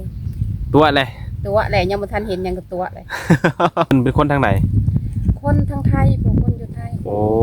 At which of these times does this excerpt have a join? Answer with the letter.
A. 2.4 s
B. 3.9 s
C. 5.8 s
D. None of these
B